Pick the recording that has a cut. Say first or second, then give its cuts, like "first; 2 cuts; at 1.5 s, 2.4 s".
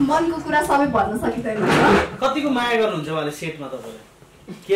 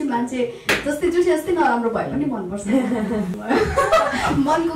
second; 1 cut; at 3.3 s